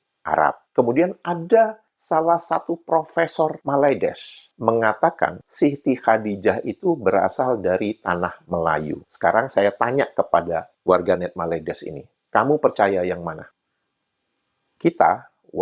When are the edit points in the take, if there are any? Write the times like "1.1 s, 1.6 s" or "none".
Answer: none